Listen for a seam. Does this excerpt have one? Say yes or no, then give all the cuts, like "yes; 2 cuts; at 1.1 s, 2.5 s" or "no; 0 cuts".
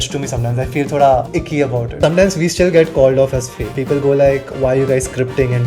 yes; 2 cuts; at 1.9 s, 3.6 s